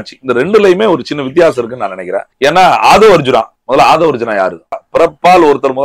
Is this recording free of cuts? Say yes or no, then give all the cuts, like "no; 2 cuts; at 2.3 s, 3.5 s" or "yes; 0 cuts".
no; 3 cuts; at 2.2 s, 3.6 s, 4.8 s